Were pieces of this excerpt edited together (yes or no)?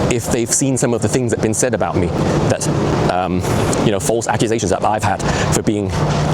no